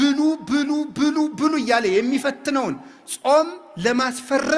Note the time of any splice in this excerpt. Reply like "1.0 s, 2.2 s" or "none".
none